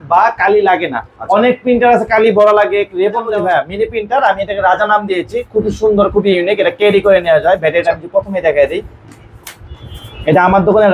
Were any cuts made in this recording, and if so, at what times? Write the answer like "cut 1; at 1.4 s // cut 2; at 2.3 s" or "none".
cut 1; at 3.3 s